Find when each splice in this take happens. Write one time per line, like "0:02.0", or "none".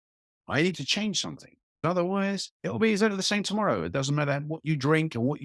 0:01.8